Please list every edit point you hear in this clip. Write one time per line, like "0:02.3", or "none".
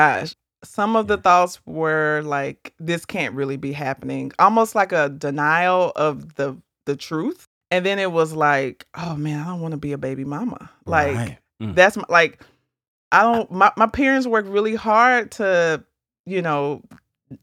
0:07.4